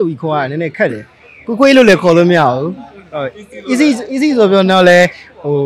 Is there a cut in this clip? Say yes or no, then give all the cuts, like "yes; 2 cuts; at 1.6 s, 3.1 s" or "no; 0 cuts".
no; 0 cuts